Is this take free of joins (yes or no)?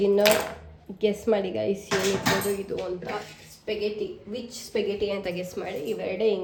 yes